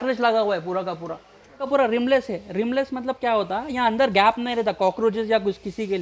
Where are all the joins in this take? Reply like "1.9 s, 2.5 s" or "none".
1.6 s